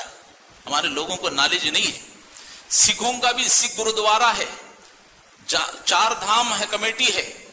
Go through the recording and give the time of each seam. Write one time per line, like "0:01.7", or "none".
none